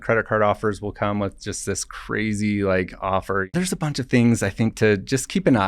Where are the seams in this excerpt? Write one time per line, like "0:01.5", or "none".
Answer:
0:03.5